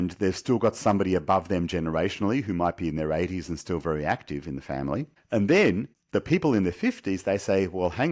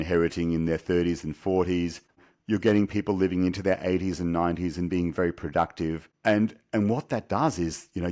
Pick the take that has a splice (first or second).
second